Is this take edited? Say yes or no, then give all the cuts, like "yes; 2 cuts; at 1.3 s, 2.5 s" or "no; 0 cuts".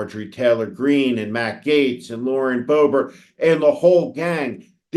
no; 0 cuts